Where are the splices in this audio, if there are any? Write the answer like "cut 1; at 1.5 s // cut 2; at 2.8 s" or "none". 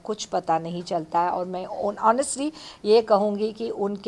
none